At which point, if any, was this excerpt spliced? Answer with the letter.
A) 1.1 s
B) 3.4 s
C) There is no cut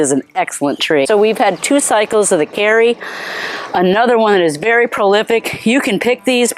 A